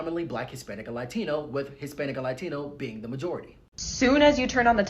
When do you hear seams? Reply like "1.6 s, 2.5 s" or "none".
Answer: 3.6 s